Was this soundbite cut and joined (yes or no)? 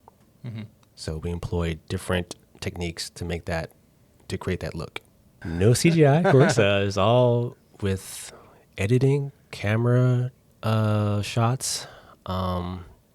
yes